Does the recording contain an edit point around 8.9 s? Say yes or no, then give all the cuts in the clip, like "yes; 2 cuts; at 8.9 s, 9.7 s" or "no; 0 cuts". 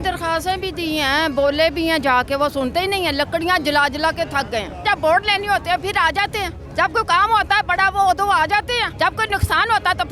yes; 3 cuts; at 4.8 s, 6.6 s, 8.9 s